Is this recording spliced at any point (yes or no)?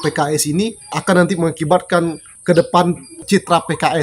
yes